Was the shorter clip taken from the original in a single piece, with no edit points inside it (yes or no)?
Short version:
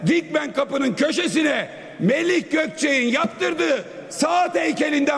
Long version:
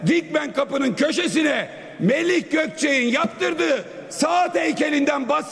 yes